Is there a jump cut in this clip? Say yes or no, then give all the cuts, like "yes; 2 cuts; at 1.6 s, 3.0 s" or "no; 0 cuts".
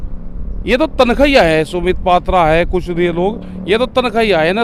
no; 0 cuts